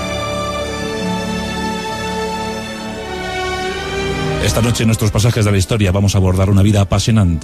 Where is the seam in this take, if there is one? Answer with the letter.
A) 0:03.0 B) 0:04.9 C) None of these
C